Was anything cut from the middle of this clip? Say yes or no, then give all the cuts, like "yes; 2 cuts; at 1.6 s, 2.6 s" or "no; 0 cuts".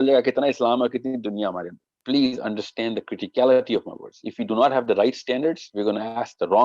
yes; 1 cut; at 1.9 s